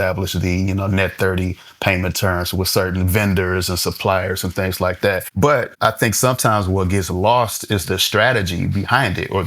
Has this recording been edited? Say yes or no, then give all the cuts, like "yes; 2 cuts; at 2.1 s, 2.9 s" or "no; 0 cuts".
yes; 1 cut; at 5.7 s